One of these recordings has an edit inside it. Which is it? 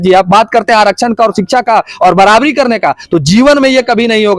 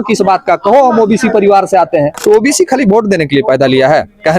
second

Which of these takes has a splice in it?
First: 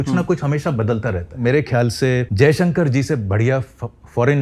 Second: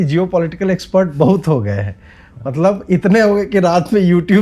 first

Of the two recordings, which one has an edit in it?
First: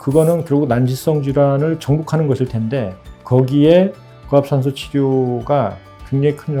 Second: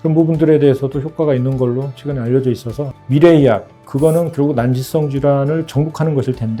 second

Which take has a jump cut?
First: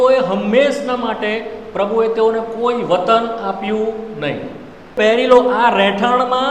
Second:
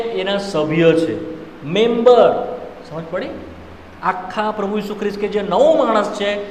first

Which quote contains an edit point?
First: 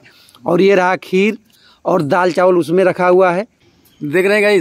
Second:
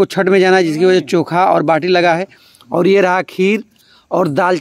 first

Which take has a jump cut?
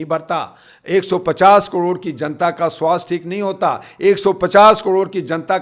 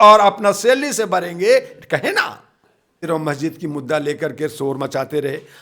second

